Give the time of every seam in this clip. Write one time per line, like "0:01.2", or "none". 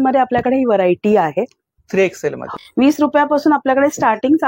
0:02.4